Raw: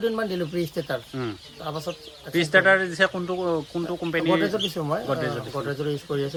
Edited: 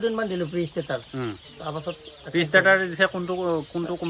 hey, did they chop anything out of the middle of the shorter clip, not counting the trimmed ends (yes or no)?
no